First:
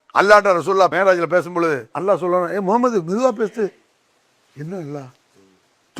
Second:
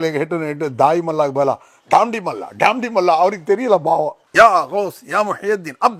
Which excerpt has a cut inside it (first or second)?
first